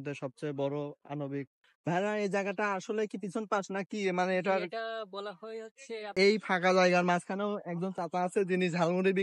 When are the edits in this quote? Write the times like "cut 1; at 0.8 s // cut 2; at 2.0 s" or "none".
cut 1; at 1.7 s // cut 2; at 6.1 s